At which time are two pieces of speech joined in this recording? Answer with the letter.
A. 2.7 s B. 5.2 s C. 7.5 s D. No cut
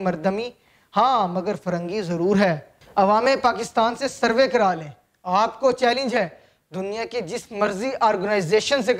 D